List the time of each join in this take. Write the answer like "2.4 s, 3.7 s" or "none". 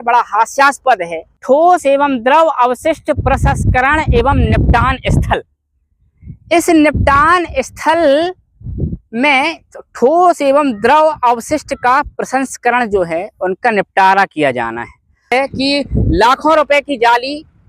1.2 s, 15.1 s